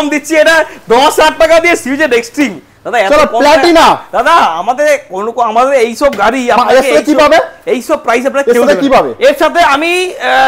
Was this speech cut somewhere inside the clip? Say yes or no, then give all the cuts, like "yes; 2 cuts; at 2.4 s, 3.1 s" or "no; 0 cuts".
no; 0 cuts